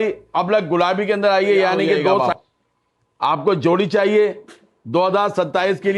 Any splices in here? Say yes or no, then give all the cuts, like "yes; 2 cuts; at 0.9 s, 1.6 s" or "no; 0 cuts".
yes; 1 cut; at 2.3 s